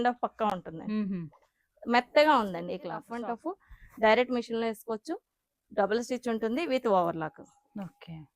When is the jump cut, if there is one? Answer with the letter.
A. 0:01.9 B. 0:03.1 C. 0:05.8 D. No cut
B